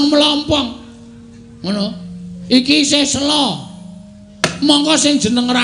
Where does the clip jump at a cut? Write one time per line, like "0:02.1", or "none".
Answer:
none

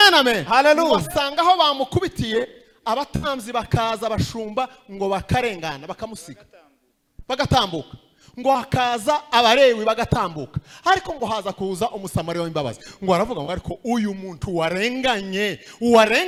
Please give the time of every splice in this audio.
none

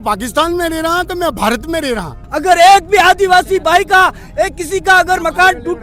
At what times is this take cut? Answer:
0:02.2

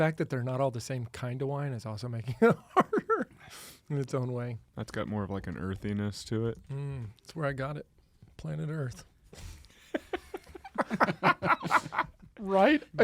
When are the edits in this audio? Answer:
0:04.6

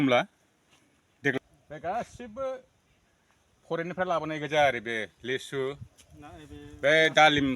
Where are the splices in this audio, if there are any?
0:01.4

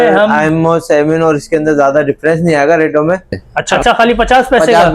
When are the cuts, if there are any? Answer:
0:03.7

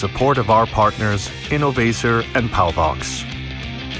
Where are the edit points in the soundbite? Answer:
0:03.0

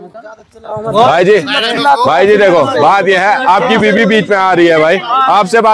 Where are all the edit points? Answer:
none

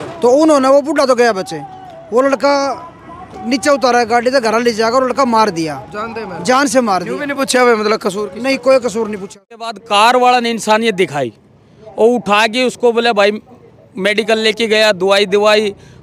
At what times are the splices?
0:09.7

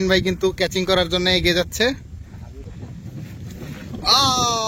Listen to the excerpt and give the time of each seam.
0:02.6

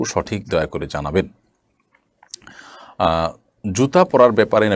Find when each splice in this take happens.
none

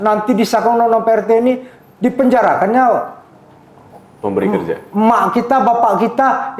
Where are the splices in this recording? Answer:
none

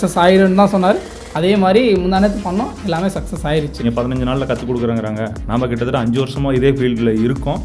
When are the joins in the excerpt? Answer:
0:03.8

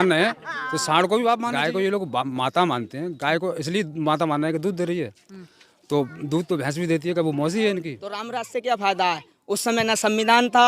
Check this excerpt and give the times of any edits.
0:01.5
0:08.2

